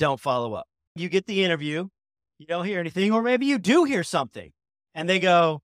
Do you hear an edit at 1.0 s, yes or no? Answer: yes